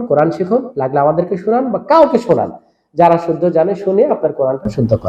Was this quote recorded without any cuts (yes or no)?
yes